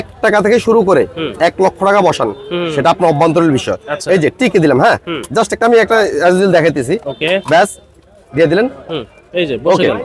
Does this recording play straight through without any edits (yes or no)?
yes